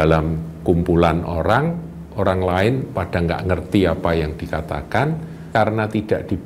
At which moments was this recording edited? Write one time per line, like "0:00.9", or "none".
0:05.5

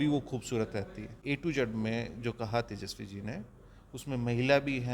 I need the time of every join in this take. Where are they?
0:01.2

